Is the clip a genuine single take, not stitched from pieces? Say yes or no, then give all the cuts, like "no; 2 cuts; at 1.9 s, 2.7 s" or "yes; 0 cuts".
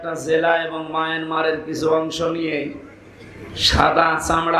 yes; 0 cuts